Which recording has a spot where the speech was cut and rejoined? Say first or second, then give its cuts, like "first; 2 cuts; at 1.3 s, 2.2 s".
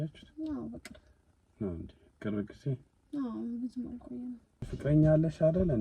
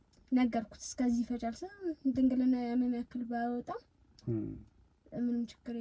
first; 1 cut; at 4.6 s